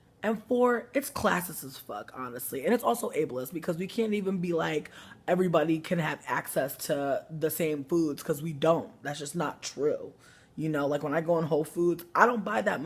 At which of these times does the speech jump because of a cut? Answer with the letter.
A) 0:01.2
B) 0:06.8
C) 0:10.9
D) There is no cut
B